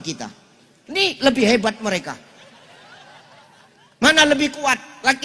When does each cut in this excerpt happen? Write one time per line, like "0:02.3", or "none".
none